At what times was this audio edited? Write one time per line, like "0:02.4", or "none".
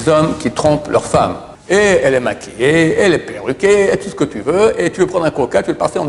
0:01.5